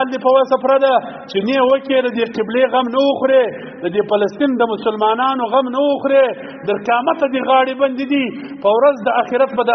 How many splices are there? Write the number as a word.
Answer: zero